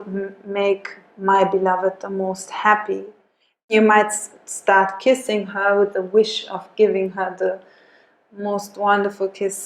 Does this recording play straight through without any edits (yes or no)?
no